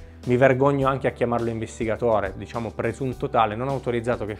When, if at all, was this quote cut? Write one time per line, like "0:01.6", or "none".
none

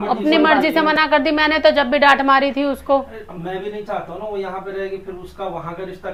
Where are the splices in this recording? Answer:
none

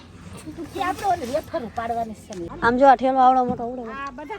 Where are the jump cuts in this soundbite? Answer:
0:02.6

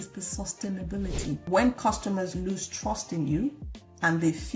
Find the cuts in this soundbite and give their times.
0:01.4

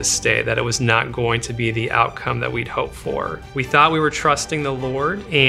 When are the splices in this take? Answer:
0:03.4

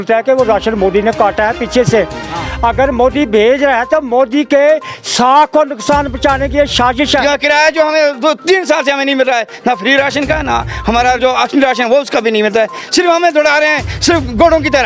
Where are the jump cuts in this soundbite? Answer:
0:07.2

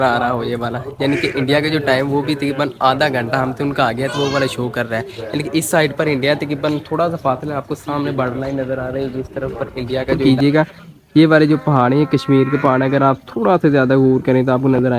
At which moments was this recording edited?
0:10.2

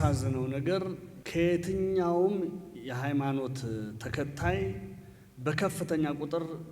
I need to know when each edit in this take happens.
0:01.1

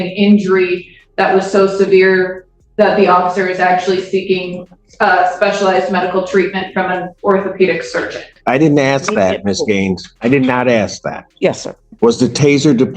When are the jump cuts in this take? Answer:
0:08.4

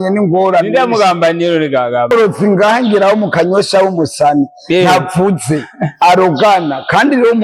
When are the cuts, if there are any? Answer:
0:02.1

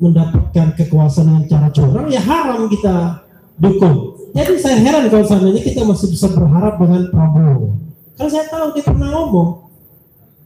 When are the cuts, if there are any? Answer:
0:04.2

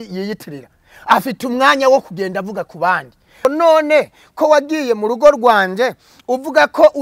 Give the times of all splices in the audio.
0:03.4

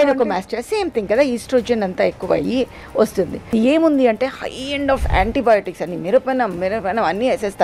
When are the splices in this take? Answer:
0:03.5

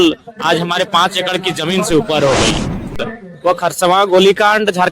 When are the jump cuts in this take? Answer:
0:03.0

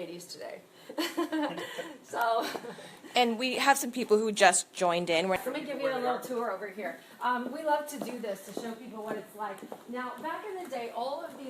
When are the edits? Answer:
0:05.4

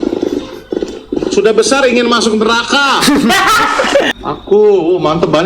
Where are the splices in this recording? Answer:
0:04.1

